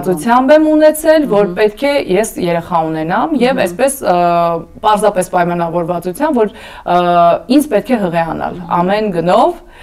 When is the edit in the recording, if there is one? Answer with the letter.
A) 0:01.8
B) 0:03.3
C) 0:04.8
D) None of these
D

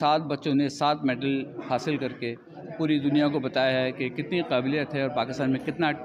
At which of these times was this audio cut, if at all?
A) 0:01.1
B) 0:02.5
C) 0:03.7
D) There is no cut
D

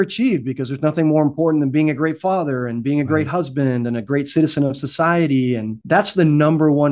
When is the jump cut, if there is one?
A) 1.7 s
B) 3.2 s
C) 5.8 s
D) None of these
C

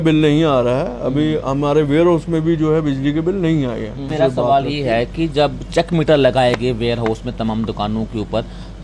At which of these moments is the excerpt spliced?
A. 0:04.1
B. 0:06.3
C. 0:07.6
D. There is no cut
A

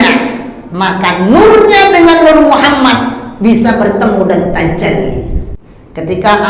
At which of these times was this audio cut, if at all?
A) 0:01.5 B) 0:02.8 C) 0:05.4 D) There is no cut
C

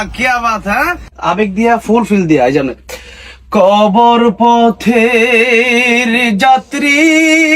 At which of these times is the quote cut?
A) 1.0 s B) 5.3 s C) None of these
A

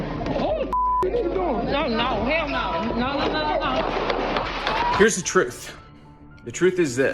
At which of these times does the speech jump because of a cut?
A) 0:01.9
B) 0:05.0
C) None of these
B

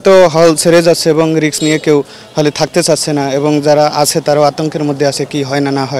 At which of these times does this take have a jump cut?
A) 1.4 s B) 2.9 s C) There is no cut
C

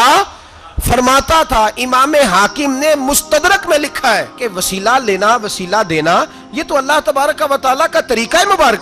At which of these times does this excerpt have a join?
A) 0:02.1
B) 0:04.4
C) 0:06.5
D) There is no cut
B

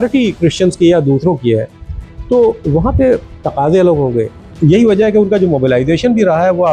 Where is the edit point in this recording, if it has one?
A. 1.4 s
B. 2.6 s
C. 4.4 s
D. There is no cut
C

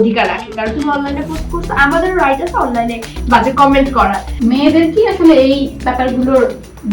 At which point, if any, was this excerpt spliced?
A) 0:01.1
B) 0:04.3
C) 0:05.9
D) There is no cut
B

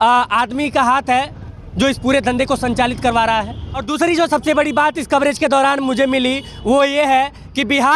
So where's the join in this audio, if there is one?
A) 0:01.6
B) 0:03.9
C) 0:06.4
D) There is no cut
B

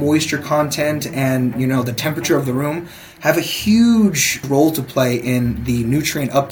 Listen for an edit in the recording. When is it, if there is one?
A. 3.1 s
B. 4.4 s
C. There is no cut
B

